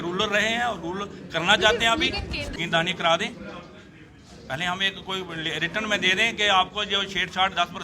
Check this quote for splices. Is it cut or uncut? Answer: cut